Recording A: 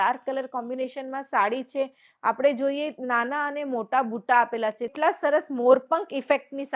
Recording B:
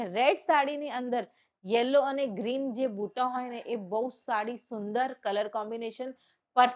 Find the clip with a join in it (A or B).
A